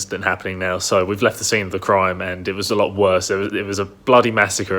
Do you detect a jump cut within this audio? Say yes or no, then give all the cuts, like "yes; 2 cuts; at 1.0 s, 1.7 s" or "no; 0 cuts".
no; 0 cuts